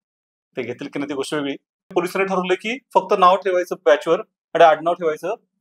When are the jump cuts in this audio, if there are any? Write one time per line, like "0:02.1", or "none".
0:01.9